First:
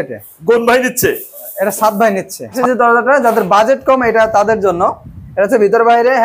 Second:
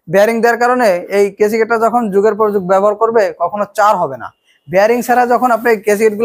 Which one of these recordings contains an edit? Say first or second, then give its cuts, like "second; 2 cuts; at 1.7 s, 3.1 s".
first; 1 cut; at 2.6 s